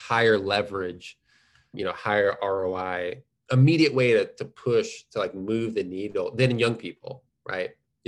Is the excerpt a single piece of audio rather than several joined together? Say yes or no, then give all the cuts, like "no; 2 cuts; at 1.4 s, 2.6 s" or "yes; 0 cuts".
no; 1 cut; at 1.7 s